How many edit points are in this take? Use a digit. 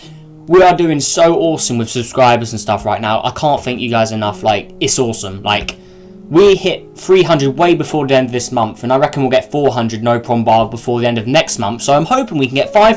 1